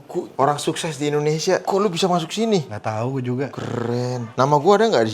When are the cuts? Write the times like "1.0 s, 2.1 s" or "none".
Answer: 1.6 s